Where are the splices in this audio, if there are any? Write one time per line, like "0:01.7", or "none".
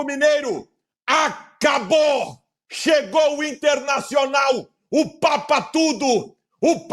none